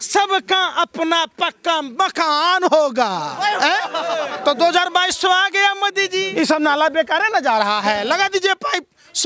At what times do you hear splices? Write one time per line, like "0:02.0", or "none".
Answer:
0:06.3